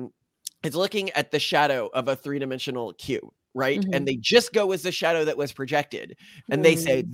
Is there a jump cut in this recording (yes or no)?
no